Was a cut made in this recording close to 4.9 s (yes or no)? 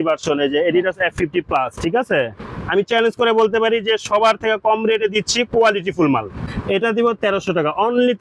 no